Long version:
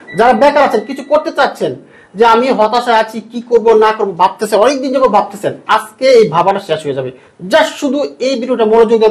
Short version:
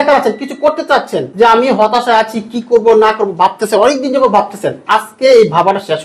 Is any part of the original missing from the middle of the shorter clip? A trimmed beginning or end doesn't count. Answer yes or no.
yes